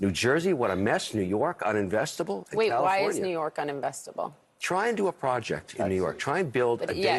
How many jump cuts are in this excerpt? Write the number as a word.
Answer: one